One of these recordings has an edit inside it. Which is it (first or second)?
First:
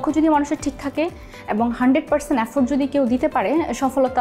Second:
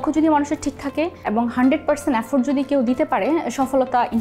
second